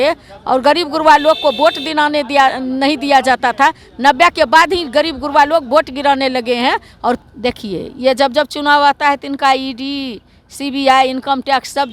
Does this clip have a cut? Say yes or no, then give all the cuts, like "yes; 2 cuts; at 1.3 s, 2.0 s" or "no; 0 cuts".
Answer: yes; 1 cut; at 7.2 s